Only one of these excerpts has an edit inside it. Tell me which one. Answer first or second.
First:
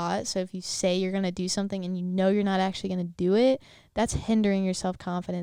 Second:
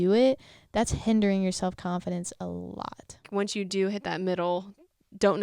second